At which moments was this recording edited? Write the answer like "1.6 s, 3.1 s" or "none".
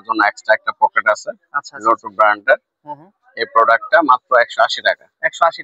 none